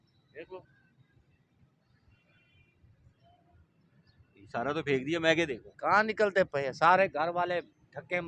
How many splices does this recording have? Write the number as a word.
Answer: one